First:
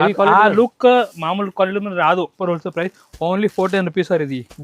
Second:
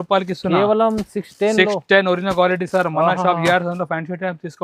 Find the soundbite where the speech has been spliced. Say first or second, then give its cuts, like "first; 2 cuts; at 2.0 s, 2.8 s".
first; 1 cut; at 2.3 s